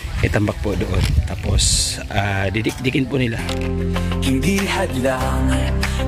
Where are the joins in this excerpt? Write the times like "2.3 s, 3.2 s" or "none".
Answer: 3.4 s